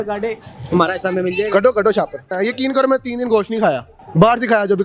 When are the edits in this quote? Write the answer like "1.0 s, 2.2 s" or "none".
2.3 s

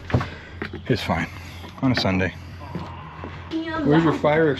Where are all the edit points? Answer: 3.5 s

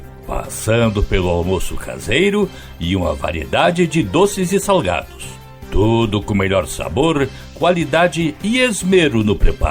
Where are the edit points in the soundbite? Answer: none

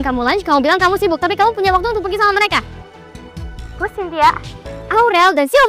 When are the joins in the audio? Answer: none

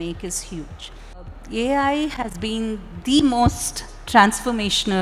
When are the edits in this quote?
1.3 s

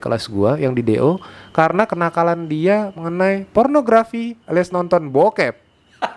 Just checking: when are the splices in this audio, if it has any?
none

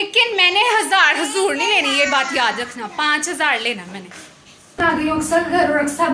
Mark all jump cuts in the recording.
4.8 s

